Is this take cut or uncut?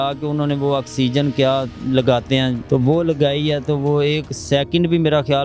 cut